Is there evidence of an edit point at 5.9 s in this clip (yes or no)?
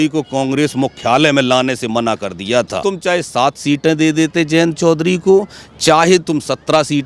no